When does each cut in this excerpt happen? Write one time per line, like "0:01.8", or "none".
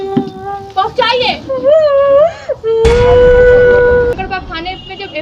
0:04.1